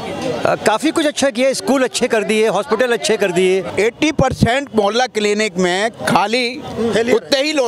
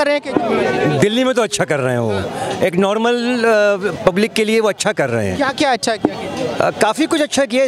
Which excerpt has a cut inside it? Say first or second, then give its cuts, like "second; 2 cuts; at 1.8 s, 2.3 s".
first; 1 cut; at 3.7 s